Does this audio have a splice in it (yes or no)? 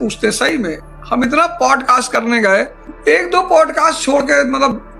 no